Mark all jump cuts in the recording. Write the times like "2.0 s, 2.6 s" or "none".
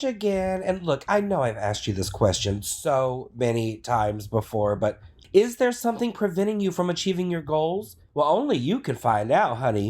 5.1 s, 7.9 s